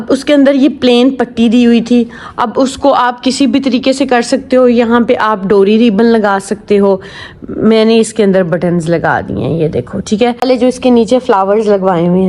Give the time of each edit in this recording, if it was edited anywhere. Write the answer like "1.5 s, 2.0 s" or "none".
10.4 s